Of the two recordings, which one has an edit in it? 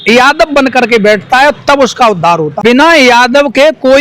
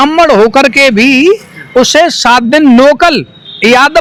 first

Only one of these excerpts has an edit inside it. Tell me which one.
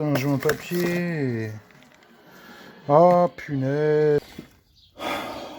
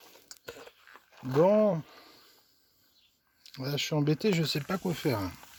first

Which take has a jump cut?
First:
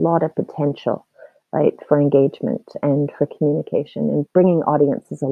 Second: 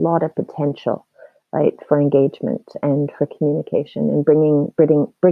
first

